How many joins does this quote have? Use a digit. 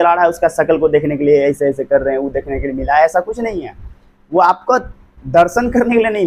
0